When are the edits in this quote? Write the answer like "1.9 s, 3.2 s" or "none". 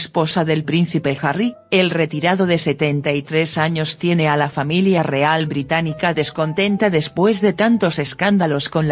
1.9 s